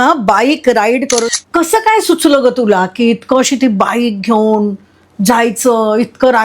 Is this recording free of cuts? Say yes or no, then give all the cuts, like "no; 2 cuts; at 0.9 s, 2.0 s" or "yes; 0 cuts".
no; 1 cut; at 1.3 s